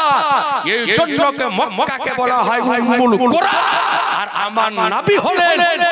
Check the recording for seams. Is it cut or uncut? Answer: uncut